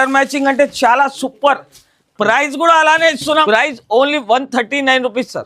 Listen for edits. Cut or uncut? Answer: cut